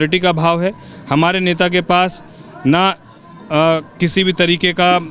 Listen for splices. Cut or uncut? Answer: uncut